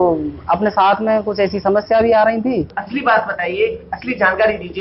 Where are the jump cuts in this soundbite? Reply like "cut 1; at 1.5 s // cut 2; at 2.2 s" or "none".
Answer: cut 1; at 2.8 s